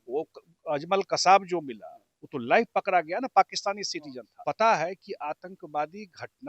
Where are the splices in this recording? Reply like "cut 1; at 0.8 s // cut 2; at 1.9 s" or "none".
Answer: cut 1; at 4.3 s